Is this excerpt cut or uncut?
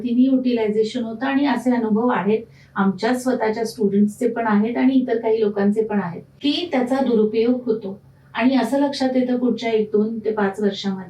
cut